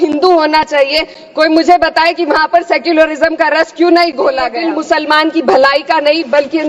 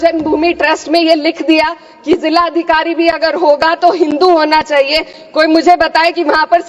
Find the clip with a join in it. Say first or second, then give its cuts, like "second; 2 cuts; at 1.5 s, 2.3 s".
first; 1 cut; at 4.6 s